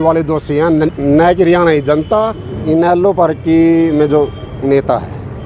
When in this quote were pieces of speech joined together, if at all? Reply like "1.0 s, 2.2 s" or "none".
1.0 s, 2.5 s